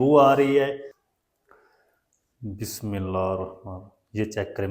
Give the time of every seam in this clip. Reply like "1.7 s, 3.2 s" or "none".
1.0 s